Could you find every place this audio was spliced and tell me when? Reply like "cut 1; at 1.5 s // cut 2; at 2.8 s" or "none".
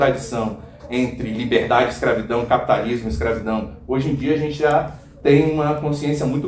none